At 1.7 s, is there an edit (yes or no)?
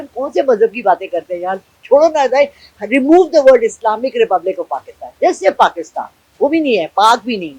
no